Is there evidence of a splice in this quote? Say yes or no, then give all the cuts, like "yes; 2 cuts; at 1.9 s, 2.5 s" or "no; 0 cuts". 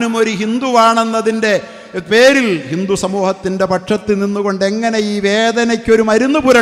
no; 0 cuts